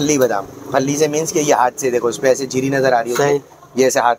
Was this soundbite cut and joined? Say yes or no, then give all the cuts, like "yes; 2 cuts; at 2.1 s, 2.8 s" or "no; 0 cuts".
no; 0 cuts